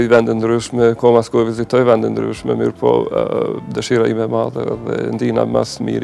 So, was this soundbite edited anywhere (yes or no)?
no